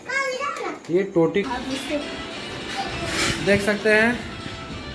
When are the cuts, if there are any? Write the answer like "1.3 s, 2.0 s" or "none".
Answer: 1.4 s